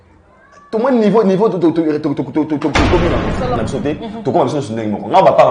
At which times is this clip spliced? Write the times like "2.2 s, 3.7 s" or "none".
3.6 s